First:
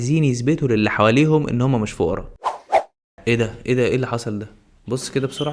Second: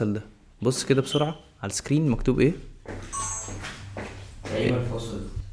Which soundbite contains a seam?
first; 1 cut; at 2.3 s

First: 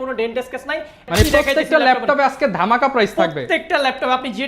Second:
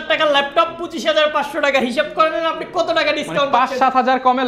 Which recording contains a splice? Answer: first; 1 cut; at 1.0 s

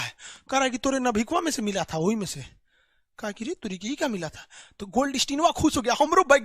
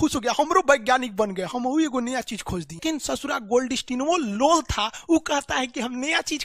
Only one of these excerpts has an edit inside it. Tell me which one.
second; 1 cut; at 2.8 s

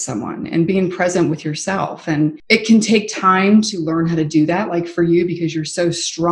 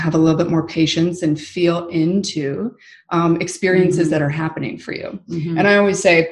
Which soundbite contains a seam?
first; 1 cut; at 2.4 s

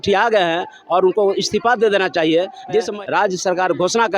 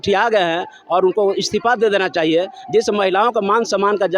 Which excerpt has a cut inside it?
first; 1 cut; at 2.9 s

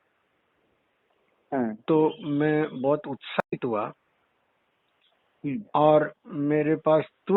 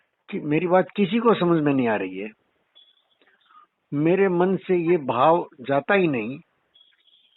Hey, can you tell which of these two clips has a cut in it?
first; 1 cut; at 6.2 s

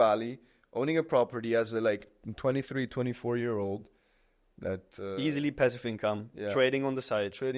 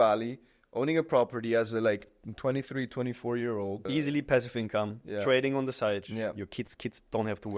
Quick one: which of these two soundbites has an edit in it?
second; 2 cuts; at 3.8 s, 6.0 s

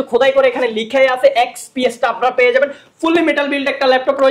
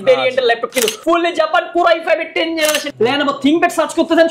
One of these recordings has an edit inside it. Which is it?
second; 2 cuts; at 1.0 s, 2.9 s

